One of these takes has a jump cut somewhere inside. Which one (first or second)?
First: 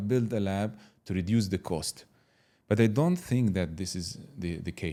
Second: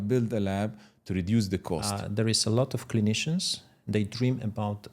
second